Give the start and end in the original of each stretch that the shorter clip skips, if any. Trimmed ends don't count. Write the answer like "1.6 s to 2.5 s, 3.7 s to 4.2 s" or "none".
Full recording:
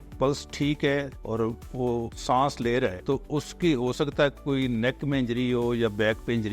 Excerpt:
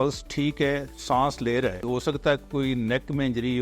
1.2 s to 2.1 s, 3.0 s to 3.8 s